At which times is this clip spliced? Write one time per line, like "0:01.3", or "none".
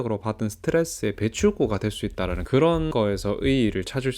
0:02.9